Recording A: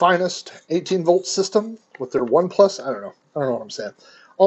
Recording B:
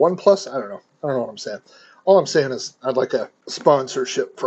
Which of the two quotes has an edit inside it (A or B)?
B